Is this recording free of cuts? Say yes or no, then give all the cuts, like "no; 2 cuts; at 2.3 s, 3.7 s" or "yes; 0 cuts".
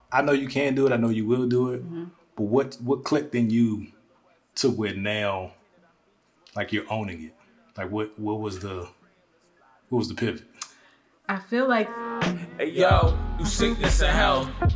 no; 1 cut; at 12.0 s